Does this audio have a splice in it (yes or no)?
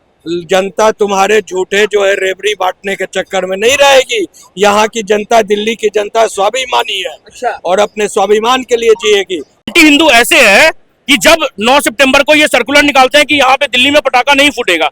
yes